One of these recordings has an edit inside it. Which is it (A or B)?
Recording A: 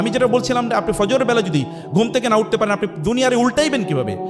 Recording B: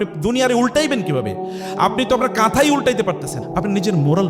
B